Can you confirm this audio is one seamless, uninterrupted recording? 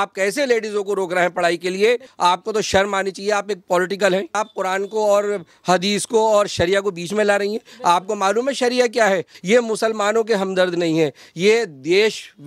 no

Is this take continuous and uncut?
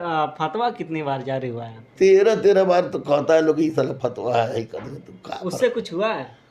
yes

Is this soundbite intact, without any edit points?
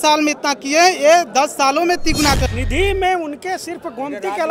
no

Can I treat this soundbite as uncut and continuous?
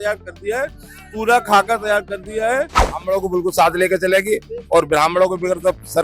no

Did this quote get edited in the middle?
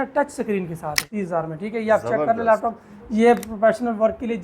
yes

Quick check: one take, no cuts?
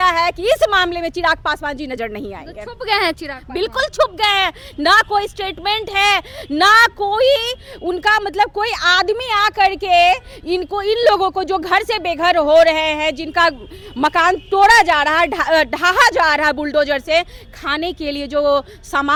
yes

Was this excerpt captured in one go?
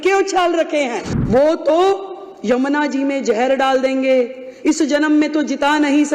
no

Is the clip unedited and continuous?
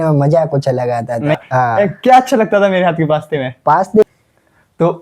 no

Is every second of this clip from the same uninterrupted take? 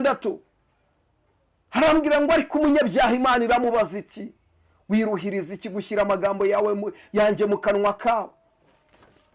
yes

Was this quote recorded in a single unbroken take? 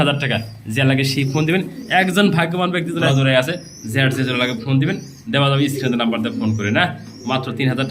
no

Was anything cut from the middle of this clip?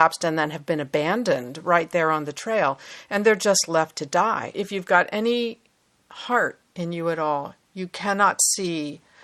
yes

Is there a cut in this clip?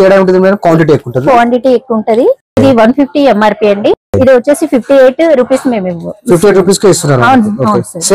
yes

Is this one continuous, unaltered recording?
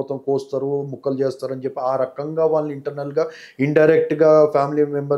yes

